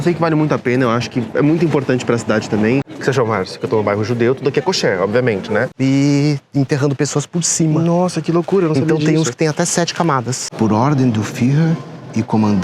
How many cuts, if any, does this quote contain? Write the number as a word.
three